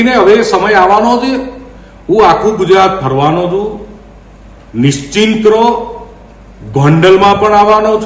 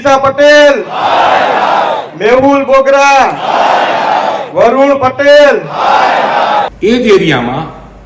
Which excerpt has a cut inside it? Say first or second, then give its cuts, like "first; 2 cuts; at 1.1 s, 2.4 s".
second; 1 cut; at 6.7 s